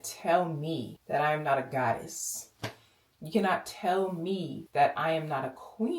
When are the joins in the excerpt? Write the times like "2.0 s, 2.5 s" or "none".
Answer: 0.9 s, 4.6 s